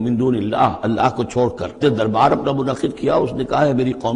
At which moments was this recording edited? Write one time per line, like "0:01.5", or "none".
0:01.8